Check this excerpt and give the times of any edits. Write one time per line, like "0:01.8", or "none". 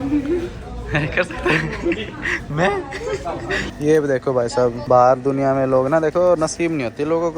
0:03.7
0:04.8